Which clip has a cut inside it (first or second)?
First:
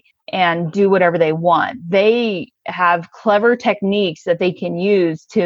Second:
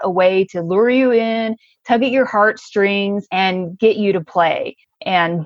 second